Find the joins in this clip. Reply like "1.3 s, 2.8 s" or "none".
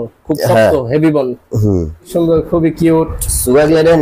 2.1 s